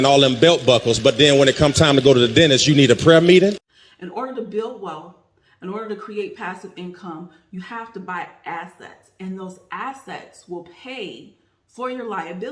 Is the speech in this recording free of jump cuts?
no; 1 cut; at 3.7 s

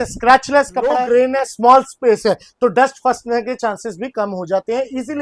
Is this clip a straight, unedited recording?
no; 1 cut; at 1.0 s

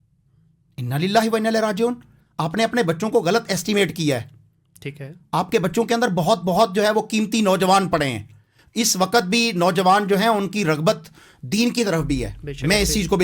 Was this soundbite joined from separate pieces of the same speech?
no; 0 cuts

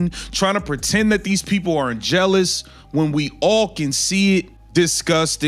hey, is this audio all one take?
no; 1 cut; at 4.6 s

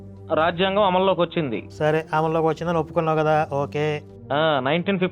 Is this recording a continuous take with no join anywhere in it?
no; 1 cut; at 1.6 s

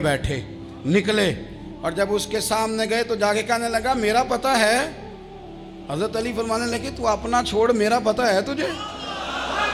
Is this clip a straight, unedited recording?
yes; 0 cuts

